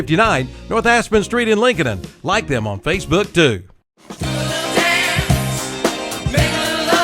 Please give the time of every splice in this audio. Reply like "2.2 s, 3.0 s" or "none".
5.8 s